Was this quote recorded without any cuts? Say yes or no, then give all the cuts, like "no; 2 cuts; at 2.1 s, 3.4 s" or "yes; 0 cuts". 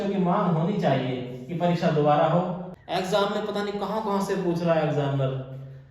no; 1 cut; at 2.7 s